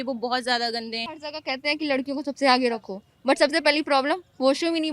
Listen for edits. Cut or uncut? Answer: cut